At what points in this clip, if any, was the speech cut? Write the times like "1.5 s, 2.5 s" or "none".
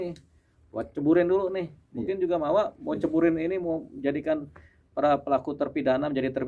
none